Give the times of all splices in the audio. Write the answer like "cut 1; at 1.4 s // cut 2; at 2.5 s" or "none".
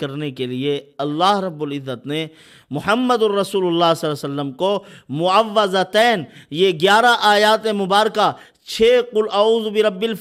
none